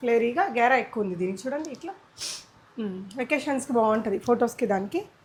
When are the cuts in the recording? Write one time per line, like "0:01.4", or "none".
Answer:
none